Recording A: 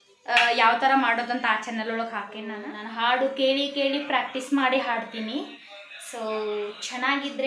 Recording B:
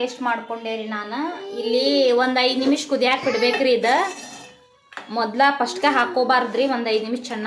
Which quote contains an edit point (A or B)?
A